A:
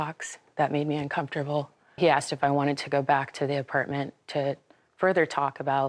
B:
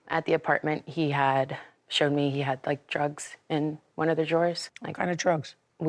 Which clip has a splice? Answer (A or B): A